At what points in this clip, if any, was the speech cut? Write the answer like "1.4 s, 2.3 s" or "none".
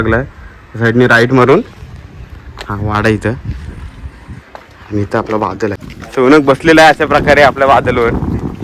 5.9 s